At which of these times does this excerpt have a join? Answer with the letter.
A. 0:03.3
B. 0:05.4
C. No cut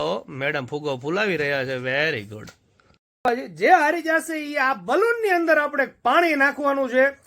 A